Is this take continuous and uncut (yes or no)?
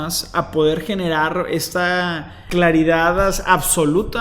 no